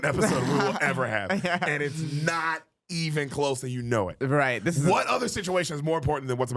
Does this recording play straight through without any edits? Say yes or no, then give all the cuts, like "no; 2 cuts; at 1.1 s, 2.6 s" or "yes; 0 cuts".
yes; 0 cuts